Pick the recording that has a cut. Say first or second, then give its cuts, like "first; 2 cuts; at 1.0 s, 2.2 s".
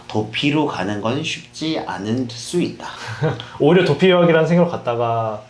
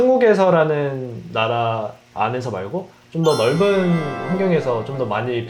first; 1 cut; at 2.9 s